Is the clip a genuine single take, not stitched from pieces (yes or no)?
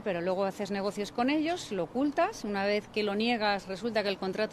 yes